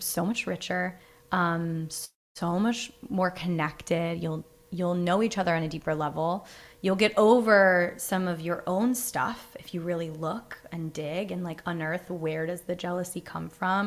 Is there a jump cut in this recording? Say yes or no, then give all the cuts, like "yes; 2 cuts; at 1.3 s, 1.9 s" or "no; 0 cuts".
no; 0 cuts